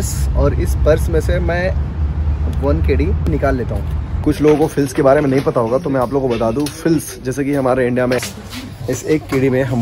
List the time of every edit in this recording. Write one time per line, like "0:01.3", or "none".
0:03.6
0:08.2